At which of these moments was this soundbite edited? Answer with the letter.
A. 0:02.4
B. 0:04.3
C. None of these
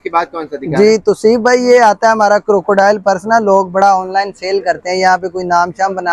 C